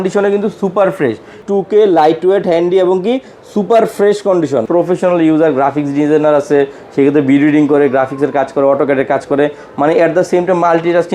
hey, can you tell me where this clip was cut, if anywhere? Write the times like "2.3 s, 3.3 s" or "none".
1.4 s, 4.6 s